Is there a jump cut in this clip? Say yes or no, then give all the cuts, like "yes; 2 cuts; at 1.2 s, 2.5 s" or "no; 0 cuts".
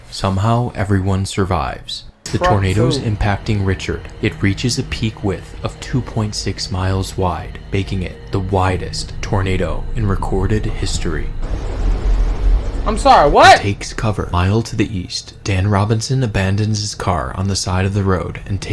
yes; 2 cuts; at 2.2 s, 11.4 s